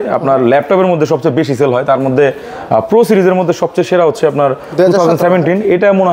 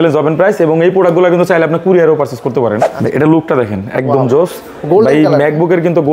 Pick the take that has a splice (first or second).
second